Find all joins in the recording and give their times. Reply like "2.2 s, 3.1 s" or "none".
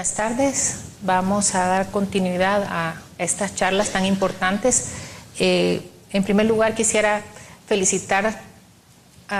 5.6 s